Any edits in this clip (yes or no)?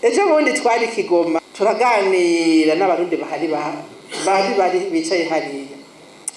yes